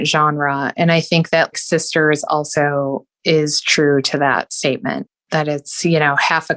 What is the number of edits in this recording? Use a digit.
1